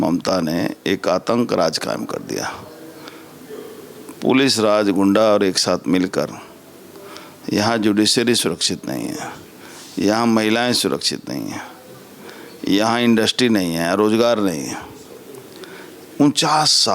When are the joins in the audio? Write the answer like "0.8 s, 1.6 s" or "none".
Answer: none